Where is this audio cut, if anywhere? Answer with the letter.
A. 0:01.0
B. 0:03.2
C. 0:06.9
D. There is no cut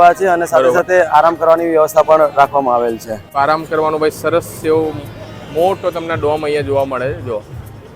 B